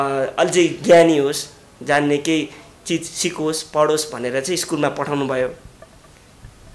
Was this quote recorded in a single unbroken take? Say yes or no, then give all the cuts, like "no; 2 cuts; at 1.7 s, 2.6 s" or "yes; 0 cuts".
yes; 0 cuts